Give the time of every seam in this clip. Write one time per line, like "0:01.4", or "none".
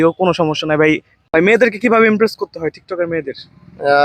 0:01.2